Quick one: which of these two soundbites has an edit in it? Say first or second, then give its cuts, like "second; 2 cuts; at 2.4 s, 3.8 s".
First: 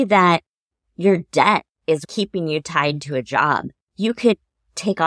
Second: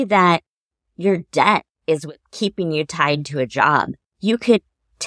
first; 1 cut; at 2.1 s